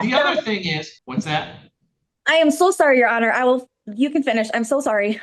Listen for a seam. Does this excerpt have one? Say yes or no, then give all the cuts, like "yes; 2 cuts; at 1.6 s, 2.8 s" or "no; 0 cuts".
yes; 1 cut; at 1.0 s